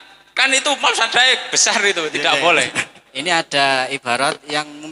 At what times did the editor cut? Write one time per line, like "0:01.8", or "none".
0:03.1